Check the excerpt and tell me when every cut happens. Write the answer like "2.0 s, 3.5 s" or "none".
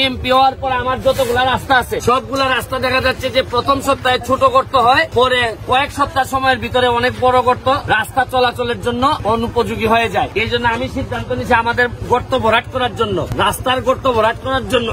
2.0 s, 5.1 s, 7.8 s, 9.2 s, 10.3 s, 13.3 s